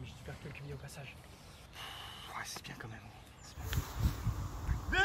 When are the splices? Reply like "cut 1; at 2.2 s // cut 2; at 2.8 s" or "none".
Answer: cut 1; at 3.6 s